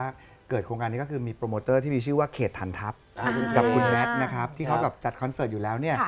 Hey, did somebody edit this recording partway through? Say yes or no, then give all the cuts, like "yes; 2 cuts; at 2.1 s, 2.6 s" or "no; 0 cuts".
no; 0 cuts